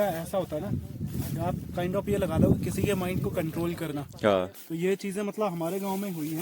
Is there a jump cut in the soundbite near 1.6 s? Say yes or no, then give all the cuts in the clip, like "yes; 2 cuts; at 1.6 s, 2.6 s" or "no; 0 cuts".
no; 1 cut; at 4.6 s